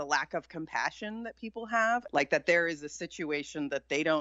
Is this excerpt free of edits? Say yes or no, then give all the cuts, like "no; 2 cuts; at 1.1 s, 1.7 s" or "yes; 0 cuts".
no; 1 cut; at 2.1 s